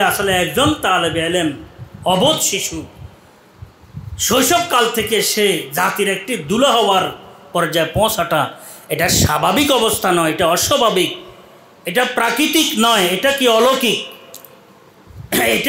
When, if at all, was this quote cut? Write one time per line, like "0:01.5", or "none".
none